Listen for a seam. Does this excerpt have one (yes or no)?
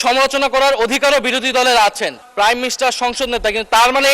yes